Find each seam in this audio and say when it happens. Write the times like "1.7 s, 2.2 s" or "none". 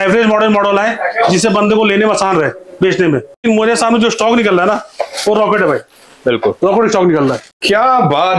3.4 s, 7.5 s

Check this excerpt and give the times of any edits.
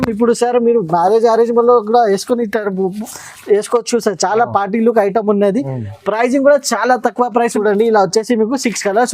7.5 s

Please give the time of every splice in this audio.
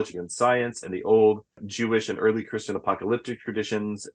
1.7 s

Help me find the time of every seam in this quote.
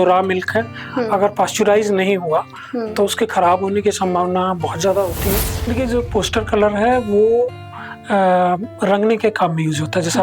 5.5 s

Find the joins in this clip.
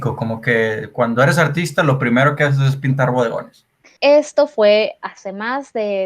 3.9 s

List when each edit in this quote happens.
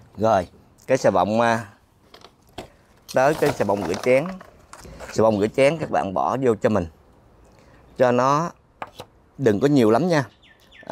none

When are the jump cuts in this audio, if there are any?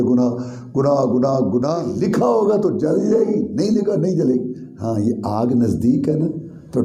1.9 s

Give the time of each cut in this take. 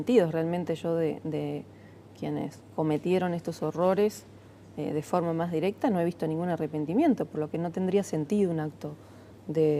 none

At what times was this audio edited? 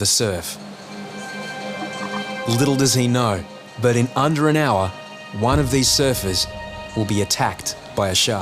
none

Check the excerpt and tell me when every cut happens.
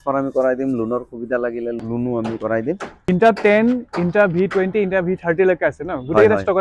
1.8 s, 3.1 s

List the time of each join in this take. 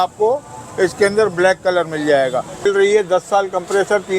2.6 s

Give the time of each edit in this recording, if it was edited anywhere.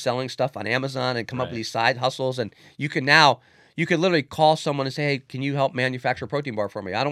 none

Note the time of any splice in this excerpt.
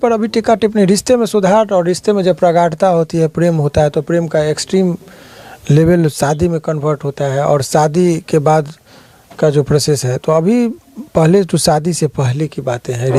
none

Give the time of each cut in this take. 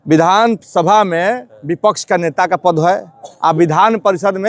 none

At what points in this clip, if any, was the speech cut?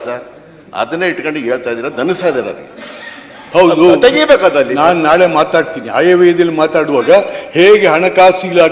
3.4 s

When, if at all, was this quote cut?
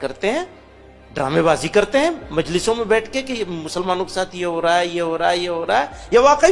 none

